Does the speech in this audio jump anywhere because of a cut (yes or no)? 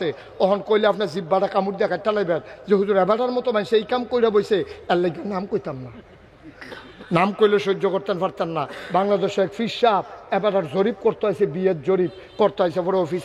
no